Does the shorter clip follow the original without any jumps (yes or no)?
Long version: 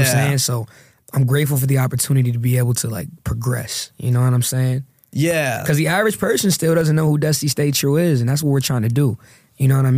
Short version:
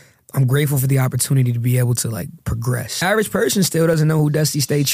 no